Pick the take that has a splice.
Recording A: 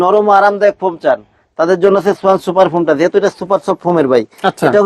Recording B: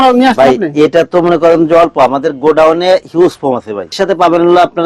B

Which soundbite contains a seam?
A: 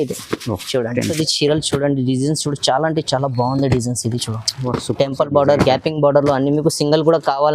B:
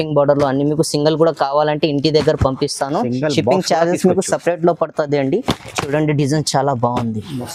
A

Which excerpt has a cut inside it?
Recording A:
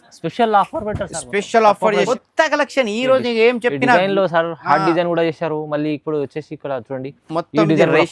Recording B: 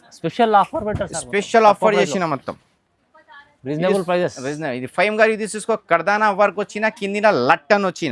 A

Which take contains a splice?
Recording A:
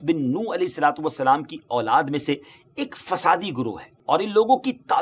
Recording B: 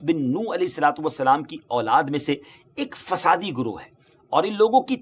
A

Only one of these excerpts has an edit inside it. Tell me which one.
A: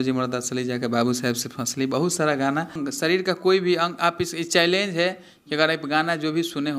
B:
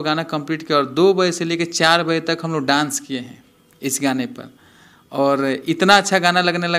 A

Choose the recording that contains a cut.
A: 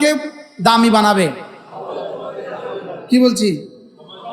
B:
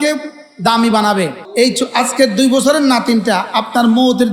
B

